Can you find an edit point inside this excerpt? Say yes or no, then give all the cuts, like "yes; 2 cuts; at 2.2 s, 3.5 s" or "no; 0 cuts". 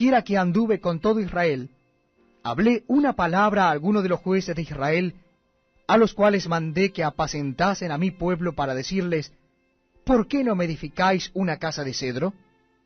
yes; 1 cut; at 6.0 s